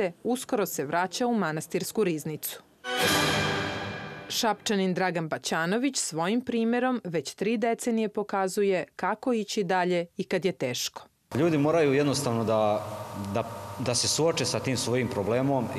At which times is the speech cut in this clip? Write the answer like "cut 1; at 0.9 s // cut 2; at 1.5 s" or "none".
none